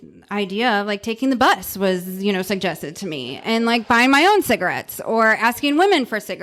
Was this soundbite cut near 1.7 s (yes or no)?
no